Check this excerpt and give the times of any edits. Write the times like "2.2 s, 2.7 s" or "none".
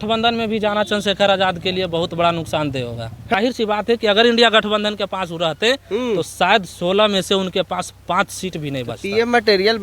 3.4 s